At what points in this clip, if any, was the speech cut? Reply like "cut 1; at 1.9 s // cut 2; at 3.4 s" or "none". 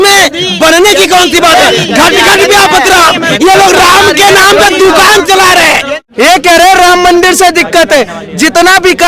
cut 1; at 5.9 s